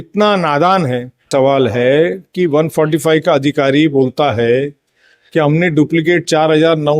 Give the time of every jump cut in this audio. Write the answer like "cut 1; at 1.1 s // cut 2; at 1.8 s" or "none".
cut 1; at 1.3 s